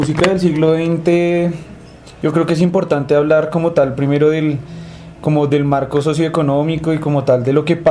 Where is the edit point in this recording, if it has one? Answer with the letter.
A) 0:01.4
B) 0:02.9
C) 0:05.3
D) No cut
B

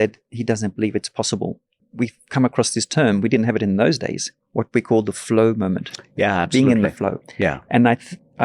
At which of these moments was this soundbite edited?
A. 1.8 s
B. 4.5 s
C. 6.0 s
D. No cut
A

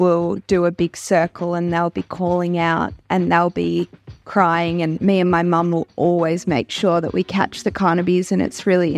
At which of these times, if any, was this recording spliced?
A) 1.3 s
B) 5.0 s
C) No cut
B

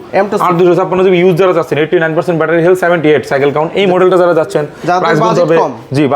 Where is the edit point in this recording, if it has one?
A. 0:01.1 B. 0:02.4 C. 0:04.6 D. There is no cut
D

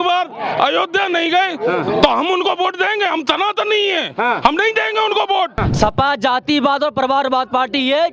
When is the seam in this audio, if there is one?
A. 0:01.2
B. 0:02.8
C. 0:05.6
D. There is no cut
C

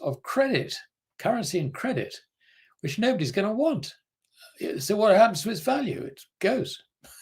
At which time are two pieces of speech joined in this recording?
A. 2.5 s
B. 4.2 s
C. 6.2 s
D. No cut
C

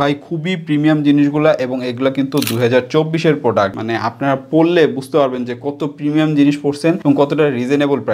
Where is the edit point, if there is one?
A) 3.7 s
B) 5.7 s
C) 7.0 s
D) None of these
A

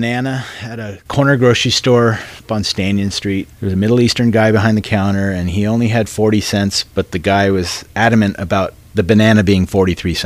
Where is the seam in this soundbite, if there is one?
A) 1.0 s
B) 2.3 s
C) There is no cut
C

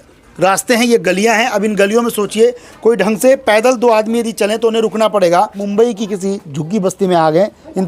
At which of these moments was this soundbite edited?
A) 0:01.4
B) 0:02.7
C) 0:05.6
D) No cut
C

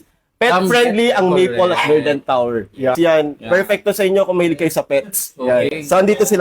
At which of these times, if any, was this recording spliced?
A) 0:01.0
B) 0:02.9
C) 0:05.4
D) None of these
B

